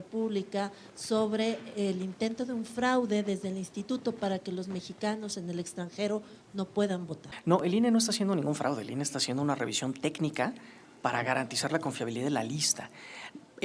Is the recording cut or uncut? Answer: cut